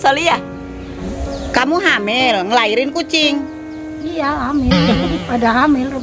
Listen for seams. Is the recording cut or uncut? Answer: cut